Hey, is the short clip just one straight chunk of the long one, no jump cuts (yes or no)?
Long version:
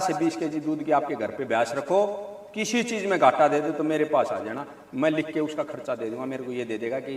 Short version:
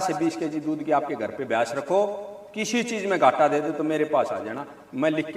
yes